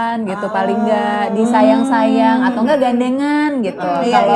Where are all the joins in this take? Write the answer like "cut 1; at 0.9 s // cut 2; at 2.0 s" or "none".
none